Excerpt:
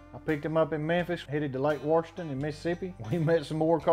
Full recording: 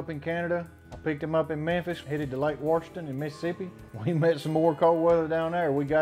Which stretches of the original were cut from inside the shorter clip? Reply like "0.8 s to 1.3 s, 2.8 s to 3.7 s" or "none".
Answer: 3.7 s to 3.9 s

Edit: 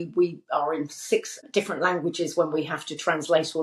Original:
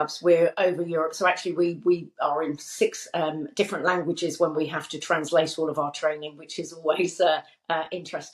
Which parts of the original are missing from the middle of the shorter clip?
3.1 s to 3.4 s

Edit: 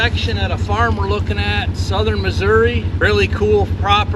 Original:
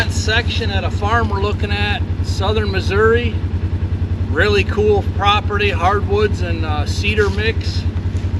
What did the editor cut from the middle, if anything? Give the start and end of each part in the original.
2.1 s to 2.3 s, 3.4 s to 4.3 s

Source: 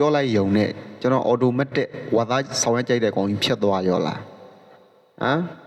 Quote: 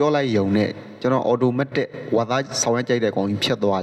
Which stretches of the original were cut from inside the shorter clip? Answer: none

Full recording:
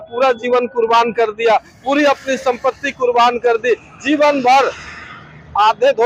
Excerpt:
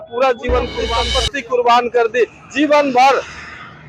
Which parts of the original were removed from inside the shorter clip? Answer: 1.0 s to 2.5 s

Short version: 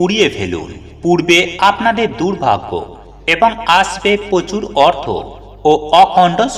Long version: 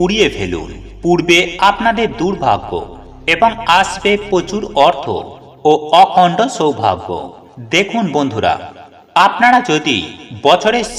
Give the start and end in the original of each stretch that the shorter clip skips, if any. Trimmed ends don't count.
none

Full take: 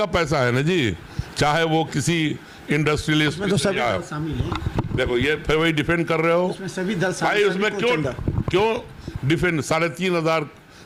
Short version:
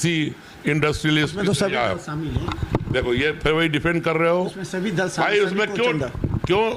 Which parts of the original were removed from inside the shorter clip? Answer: none

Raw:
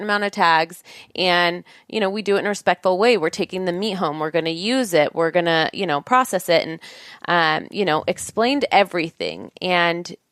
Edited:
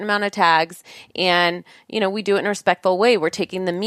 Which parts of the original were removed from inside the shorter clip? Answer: none

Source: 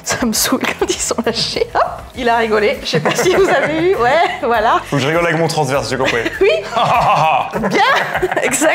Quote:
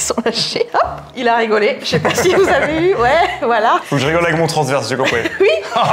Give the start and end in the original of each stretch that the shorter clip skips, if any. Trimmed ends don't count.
none

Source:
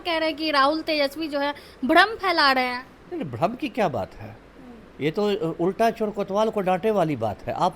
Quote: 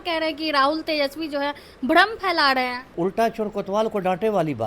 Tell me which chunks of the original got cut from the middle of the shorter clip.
2.9 s to 5.5 s

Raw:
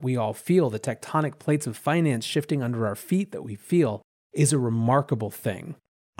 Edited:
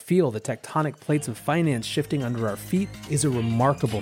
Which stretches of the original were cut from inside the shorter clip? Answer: 3.4 s to 4.3 s

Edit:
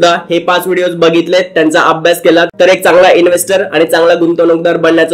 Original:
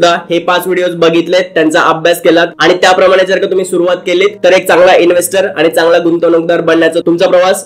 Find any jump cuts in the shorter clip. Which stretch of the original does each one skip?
2.5 s to 4.4 s

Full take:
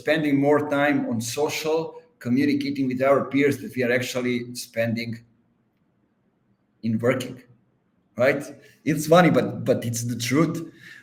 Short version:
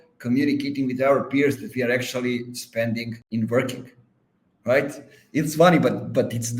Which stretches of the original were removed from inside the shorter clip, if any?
5.2 s to 6.7 s

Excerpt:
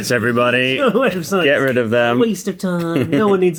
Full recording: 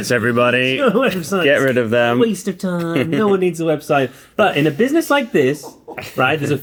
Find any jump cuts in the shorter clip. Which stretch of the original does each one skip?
none

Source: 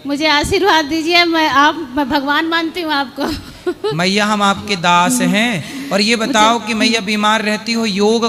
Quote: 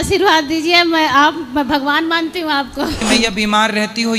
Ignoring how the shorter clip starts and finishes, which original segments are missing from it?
3.4 s to 6.7 s

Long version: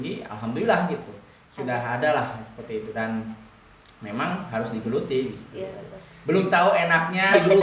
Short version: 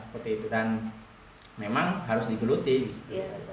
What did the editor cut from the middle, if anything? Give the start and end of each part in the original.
none

